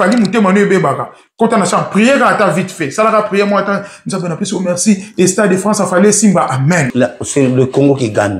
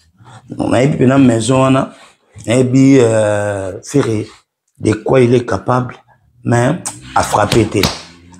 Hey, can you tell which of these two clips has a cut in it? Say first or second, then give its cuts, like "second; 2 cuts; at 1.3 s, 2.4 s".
first; 1 cut; at 6.9 s